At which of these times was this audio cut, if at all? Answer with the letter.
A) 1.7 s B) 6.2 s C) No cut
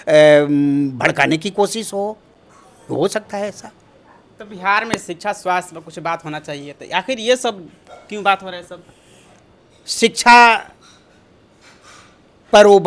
C